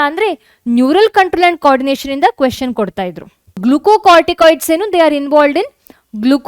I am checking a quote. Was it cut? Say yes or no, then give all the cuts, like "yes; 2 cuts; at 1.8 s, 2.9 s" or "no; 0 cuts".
yes; 1 cut; at 3.6 s